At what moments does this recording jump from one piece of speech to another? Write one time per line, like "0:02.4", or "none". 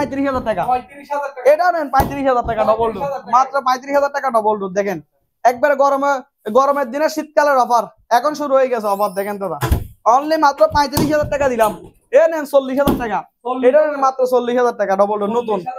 none